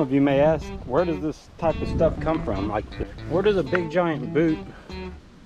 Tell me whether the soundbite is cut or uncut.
cut